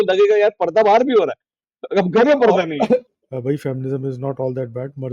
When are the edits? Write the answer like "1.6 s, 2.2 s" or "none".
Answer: 3.1 s